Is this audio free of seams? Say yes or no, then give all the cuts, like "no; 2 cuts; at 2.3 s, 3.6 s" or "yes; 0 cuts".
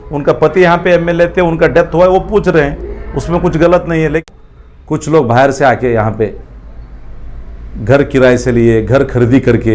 no; 1 cut; at 4.2 s